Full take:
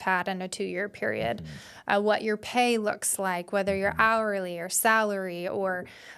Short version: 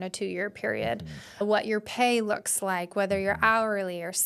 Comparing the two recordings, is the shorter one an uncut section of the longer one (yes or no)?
no